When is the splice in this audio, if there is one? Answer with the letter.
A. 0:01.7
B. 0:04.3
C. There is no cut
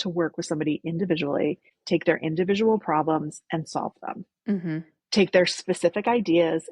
A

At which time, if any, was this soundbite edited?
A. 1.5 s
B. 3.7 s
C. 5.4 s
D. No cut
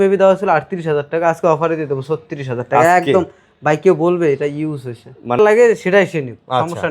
C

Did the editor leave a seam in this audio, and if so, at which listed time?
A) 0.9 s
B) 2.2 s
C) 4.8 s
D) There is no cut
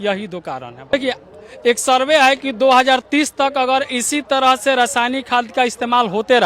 A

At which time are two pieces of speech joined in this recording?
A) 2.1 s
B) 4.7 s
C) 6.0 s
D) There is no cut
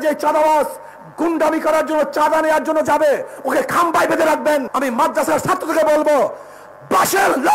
B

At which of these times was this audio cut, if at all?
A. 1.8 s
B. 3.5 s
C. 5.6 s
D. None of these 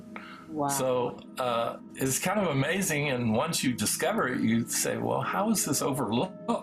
A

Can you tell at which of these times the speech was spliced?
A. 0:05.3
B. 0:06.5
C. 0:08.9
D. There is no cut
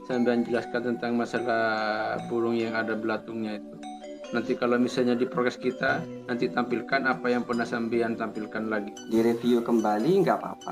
C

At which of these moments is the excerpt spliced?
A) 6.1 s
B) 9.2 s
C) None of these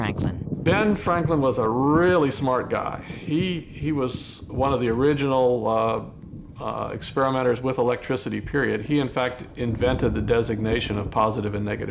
B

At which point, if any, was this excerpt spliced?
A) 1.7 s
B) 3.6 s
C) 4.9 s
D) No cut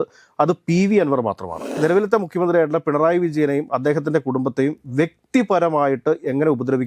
A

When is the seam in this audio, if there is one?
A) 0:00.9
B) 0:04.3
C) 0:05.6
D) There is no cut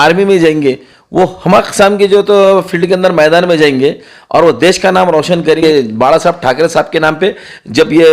C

